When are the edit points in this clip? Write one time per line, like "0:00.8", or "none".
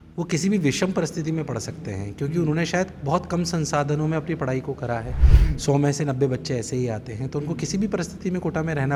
none